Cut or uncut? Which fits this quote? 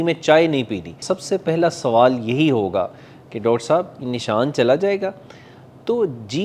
cut